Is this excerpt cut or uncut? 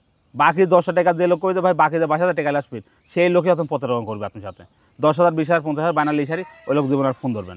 uncut